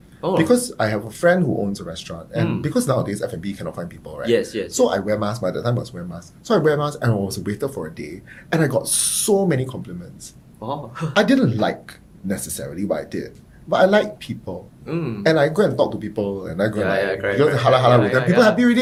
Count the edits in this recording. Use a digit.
0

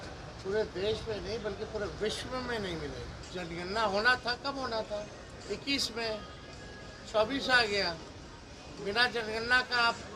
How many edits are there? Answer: 1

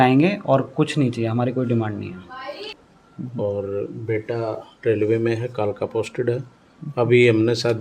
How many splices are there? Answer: 1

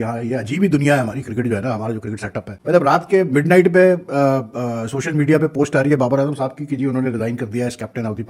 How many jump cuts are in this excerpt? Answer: 0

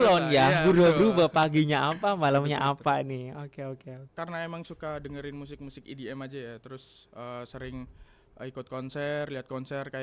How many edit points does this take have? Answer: 1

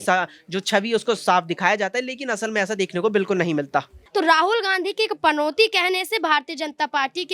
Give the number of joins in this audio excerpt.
1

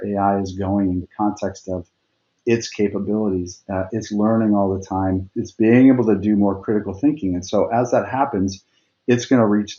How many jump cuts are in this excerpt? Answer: 1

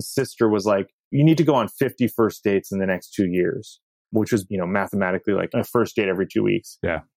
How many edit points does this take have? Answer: 3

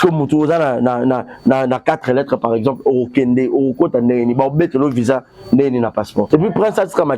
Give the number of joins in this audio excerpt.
1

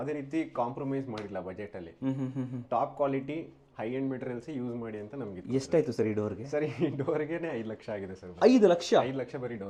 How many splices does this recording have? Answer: 0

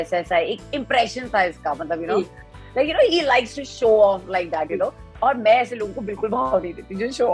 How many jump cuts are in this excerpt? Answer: 2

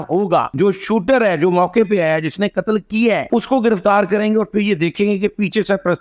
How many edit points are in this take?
0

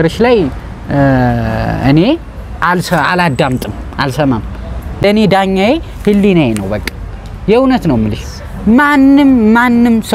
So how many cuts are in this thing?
1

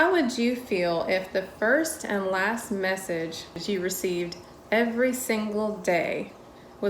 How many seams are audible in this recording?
1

